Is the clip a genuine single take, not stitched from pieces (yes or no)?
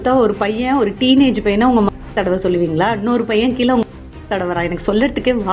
yes